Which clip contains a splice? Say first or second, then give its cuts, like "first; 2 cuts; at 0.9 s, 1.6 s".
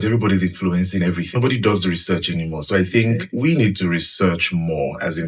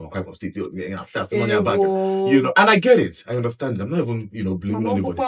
first; 2 cuts; at 1.4 s, 3.3 s